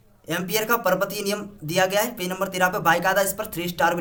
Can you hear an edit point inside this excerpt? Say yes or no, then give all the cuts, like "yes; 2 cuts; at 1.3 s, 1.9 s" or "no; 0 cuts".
no; 0 cuts